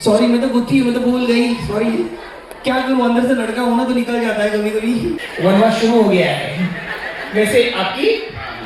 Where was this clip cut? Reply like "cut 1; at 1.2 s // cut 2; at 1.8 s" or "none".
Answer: cut 1; at 5.2 s